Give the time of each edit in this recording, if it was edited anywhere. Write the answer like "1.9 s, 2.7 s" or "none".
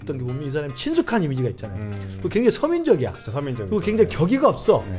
none